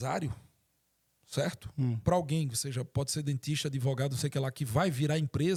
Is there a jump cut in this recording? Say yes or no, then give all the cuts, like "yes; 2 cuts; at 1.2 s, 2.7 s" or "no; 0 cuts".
no; 0 cuts